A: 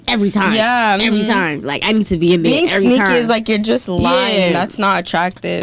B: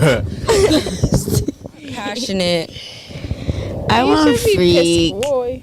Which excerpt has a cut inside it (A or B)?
B